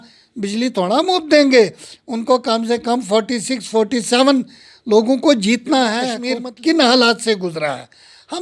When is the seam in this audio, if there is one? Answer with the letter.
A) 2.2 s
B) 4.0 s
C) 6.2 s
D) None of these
C